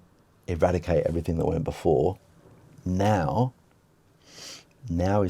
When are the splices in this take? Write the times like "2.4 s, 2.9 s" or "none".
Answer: none